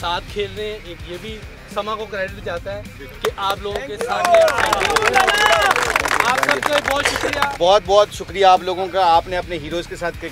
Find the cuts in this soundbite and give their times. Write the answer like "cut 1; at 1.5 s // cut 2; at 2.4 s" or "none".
cut 1; at 7.5 s

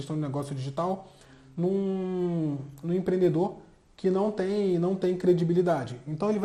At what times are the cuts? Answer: none

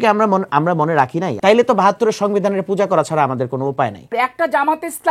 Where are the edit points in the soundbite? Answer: cut 1; at 1.3 s // cut 2; at 4.0 s

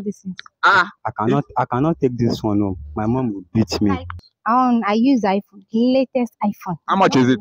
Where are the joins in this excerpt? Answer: cut 1; at 4.2 s

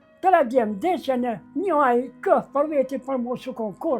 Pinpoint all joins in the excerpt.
cut 1; at 1.4 s

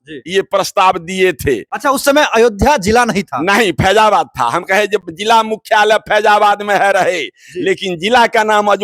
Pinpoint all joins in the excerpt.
none

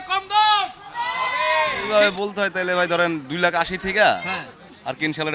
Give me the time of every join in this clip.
cut 1; at 1.8 s

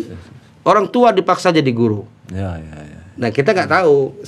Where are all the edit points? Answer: none

